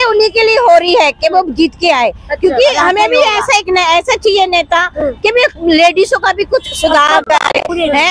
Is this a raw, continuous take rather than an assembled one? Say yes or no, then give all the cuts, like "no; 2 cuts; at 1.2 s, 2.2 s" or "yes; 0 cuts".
yes; 0 cuts